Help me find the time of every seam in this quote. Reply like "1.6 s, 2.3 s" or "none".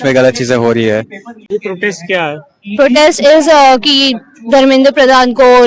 1.3 s